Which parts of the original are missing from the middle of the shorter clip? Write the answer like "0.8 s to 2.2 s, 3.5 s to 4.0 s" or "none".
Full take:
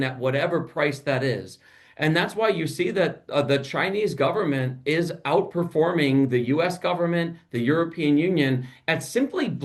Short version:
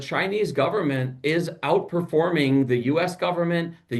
none